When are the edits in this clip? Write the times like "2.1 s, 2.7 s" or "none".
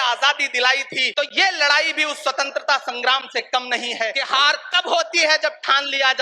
1.0 s, 4.2 s